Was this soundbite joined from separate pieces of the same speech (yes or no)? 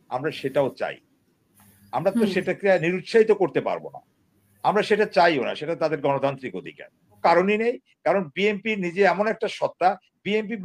yes